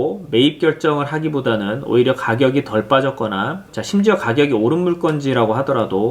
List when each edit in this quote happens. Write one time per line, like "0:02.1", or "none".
none